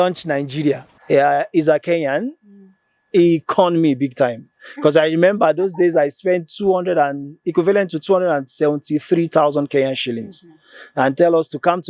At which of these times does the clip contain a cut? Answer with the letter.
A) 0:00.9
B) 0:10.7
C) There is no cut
A